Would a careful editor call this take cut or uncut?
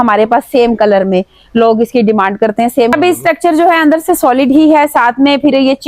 cut